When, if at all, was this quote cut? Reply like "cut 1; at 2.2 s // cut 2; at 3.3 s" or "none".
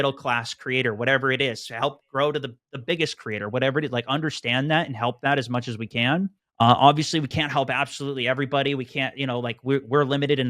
cut 1; at 6.4 s